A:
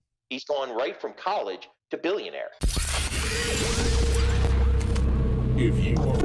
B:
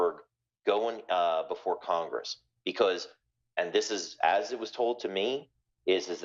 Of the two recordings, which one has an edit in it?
A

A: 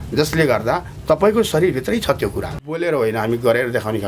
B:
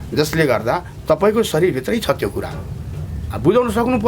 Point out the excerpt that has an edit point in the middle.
A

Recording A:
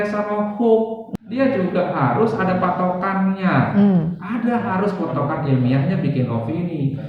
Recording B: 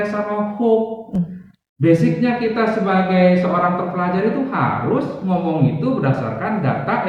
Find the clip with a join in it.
A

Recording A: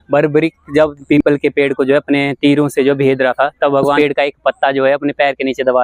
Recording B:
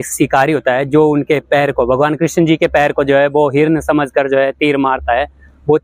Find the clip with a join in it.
A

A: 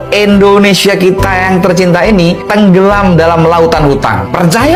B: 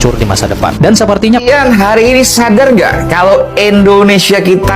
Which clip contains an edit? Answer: B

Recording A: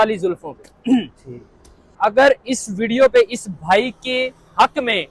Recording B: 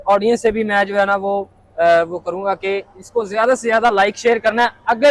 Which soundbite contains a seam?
A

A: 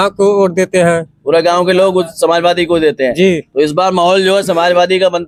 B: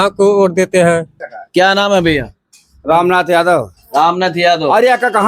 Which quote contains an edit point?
B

